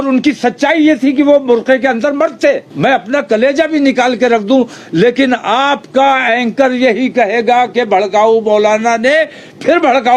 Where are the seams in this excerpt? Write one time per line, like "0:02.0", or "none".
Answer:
0:02.7